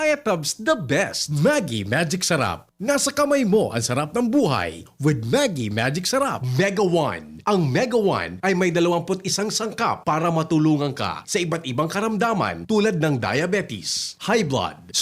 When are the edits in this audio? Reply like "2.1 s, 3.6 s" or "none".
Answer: 1.3 s, 6.4 s